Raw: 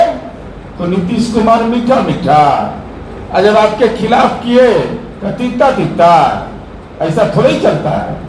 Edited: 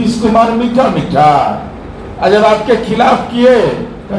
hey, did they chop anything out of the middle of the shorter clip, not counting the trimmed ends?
no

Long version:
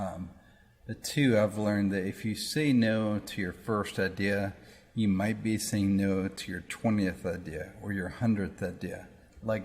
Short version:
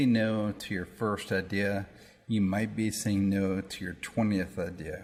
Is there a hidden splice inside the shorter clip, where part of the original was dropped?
no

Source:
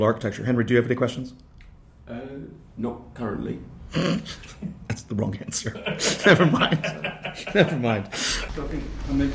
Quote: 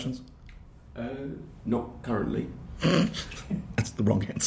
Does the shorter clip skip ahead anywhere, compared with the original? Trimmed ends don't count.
no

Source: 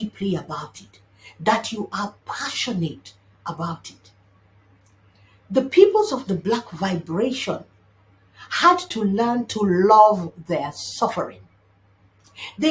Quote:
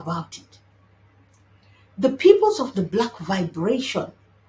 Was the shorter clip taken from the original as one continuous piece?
yes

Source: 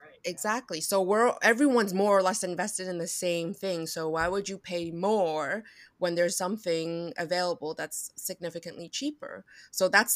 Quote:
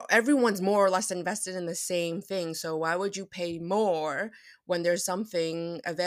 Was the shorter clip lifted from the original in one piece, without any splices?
yes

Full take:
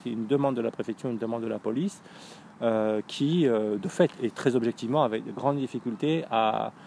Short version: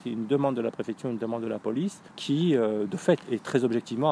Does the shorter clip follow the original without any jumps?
no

